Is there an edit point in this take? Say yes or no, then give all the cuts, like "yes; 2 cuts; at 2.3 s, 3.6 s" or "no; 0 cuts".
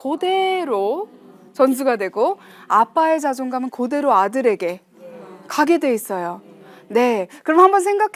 no; 0 cuts